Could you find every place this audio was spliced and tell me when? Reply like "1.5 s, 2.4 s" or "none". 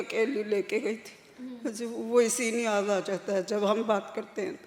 none